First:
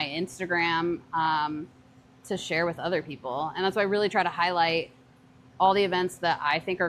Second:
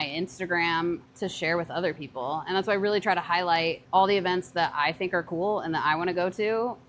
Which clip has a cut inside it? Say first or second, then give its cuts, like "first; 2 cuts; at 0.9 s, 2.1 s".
second; 2 cuts; at 1.0 s, 3.8 s